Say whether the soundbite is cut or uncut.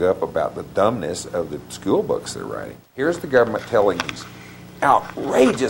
cut